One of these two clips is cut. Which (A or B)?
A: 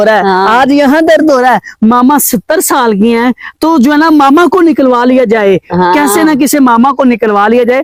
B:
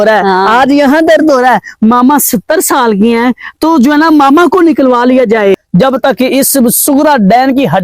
B